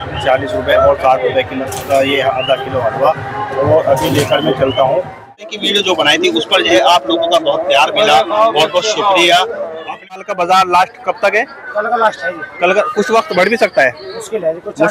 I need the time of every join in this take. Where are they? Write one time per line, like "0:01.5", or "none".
0:05.5
0:10.3